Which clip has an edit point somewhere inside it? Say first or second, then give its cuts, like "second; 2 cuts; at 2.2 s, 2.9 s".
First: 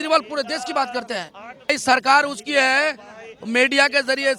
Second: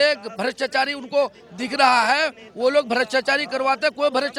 first; 1 cut; at 1.7 s